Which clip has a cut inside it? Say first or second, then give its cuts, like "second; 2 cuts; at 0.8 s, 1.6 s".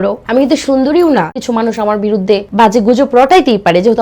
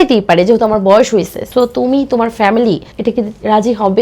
first; 2 cuts; at 1.4 s, 2.5 s